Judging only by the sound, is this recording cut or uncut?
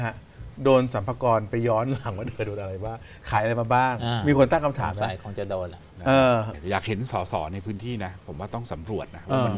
cut